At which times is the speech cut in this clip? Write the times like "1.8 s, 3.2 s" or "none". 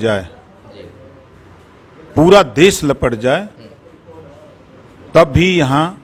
none